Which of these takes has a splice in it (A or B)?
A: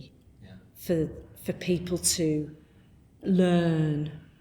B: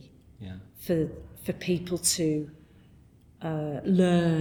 A